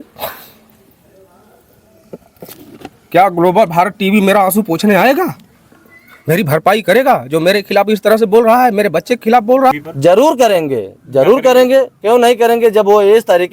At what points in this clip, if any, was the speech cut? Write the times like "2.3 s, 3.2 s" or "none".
9.8 s